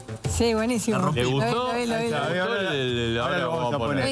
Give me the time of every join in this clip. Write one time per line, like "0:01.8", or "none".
none